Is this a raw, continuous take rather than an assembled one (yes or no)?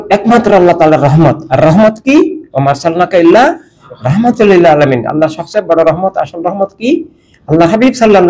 yes